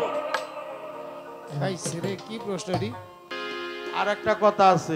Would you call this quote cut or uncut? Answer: cut